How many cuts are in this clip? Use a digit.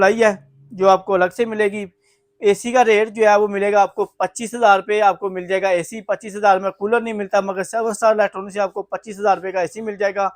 0